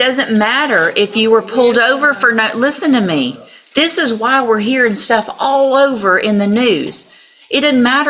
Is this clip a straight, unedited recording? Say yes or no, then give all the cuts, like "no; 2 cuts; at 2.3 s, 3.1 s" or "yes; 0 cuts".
yes; 0 cuts